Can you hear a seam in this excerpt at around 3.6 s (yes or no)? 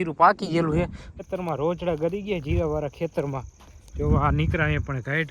no